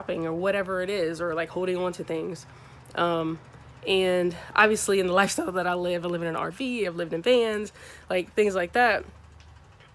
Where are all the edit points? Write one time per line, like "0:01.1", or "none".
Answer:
none